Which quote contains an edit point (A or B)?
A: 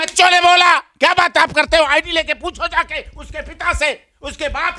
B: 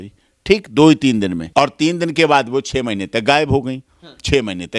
B